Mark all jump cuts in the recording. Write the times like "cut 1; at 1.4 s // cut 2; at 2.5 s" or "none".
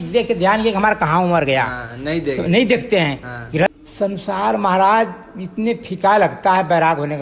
cut 1; at 3.7 s